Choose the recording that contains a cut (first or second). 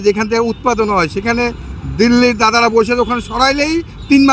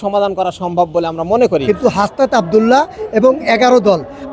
second